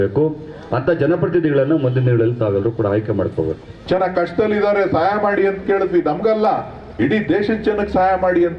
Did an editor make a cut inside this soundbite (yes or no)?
yes